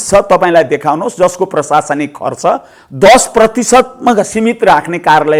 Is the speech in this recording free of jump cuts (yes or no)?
yes